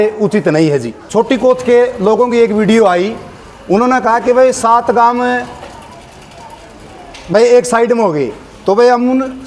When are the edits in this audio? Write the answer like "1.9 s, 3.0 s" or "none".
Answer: 1.0 s